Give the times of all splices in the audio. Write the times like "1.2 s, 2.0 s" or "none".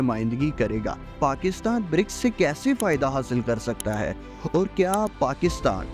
1.1 s